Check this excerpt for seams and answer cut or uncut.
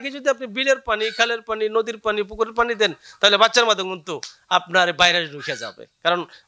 uncut